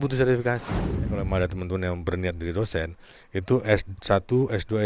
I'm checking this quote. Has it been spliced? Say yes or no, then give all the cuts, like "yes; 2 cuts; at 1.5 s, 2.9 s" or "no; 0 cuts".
yes; 1 cut; at 1.2 s